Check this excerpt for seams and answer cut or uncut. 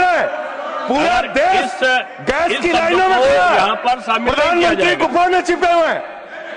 uncut